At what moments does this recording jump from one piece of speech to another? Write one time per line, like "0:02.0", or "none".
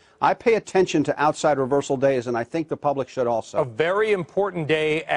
0:01.0